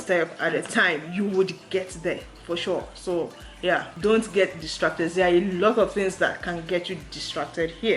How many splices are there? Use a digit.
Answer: 1